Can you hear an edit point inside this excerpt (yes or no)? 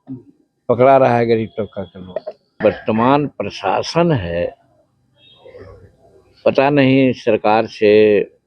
yes